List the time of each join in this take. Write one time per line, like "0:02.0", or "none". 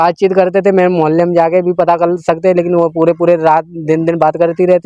none